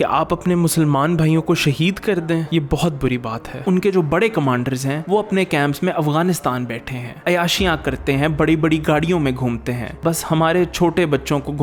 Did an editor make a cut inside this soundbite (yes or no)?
no